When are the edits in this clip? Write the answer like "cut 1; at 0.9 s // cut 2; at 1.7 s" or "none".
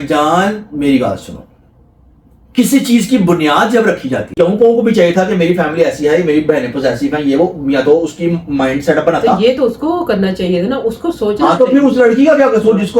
cut 1; at 4.3 s